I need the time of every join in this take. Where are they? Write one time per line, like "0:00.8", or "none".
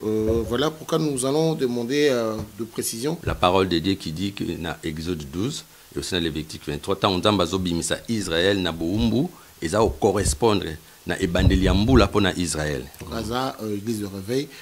0:03.3
0:13.0